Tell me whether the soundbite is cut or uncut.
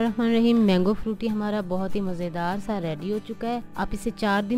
cut